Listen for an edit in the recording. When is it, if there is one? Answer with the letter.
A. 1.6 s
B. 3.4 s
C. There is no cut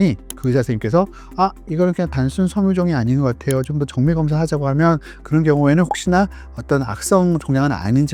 C